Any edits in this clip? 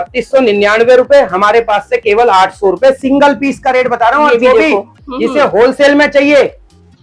no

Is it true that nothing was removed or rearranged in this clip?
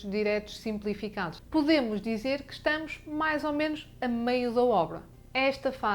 no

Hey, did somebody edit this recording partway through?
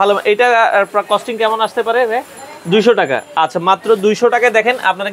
no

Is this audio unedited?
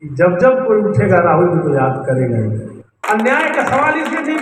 no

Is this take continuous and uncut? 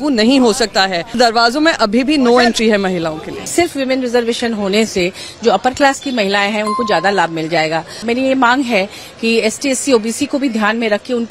no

